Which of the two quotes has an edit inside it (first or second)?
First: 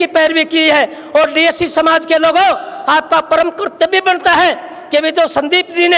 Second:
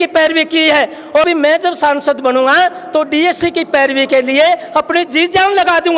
second